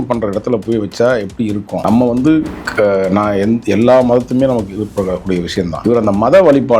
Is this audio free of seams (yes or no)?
no